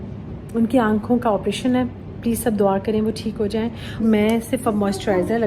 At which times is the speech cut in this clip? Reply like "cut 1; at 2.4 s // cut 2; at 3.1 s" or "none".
cut 1; at 4.0 s